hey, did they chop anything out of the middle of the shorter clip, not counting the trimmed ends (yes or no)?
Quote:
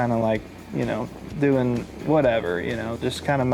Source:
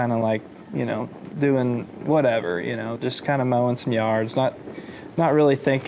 no